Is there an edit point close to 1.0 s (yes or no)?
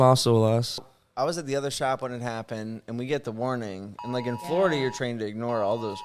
yes